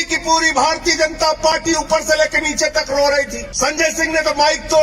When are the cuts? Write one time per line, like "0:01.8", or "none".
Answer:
0:03.4